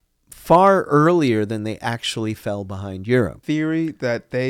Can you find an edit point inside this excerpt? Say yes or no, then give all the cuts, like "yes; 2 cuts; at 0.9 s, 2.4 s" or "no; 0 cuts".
yes; 1 cut; at 3.4 s